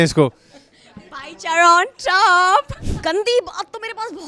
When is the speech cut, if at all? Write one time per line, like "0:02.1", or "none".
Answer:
0:02.8

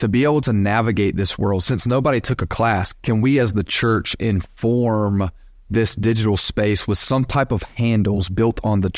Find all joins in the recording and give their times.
0:02.9

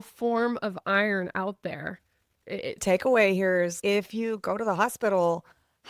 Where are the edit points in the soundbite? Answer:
0:02.8

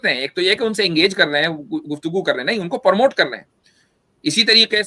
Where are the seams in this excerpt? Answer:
none

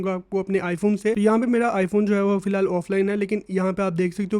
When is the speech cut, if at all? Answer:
0:01.2

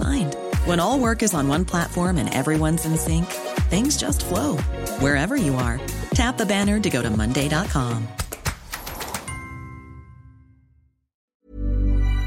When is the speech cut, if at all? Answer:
0:11.3

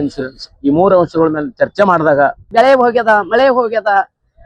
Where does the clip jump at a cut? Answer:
0:02.4

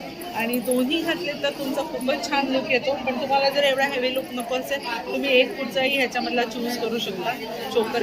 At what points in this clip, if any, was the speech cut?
none

